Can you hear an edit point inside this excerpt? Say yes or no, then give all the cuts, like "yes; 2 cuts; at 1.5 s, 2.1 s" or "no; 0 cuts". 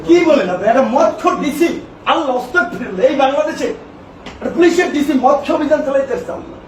no; 0 cuts